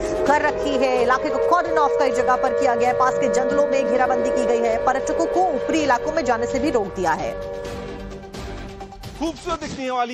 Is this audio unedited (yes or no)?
yes